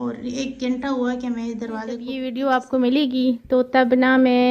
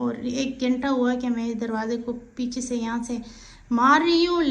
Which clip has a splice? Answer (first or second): first